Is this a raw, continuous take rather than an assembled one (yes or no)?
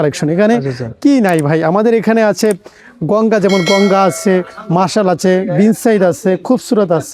yes